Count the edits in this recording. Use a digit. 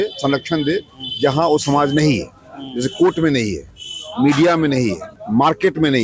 1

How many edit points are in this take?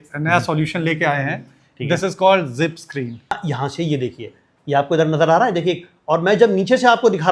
1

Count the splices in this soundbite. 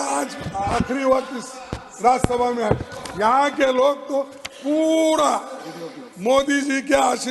0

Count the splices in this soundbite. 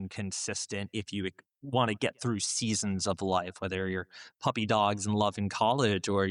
0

